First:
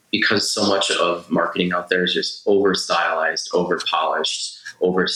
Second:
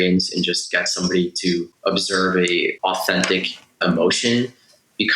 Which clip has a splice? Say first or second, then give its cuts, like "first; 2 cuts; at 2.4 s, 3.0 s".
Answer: second; 3 cuts; at 1.7 s, 2.8 s, 3.8 s